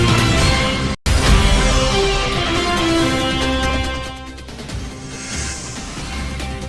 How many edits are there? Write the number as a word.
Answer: one